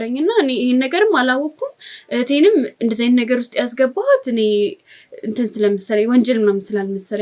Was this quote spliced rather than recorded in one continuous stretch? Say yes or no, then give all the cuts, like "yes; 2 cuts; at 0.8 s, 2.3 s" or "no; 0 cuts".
no; 0 cuts